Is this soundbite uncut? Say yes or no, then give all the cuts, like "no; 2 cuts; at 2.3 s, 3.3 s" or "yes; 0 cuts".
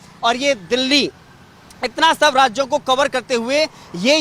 yes; 0 cuts